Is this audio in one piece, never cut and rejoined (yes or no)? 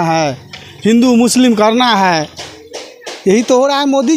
yes